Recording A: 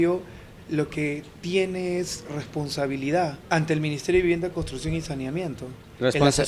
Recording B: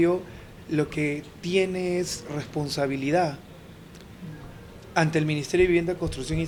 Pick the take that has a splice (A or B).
A